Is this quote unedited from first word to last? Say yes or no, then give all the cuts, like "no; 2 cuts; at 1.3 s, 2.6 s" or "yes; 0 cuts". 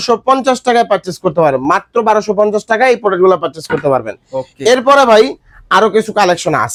yes; 0 cuts